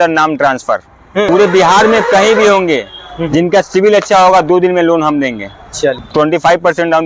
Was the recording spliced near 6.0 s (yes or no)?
yes